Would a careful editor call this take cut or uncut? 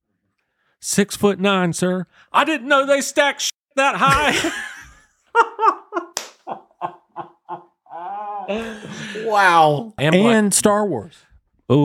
cut